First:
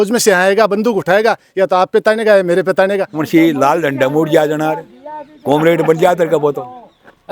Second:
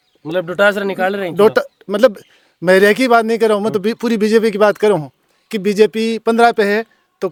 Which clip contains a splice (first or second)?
first